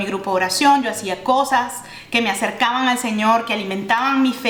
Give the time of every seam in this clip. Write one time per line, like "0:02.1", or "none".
none